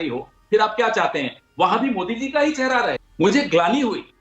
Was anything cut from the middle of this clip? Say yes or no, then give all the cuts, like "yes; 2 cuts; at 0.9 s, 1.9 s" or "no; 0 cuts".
yes; 1 cut; at 3.0 s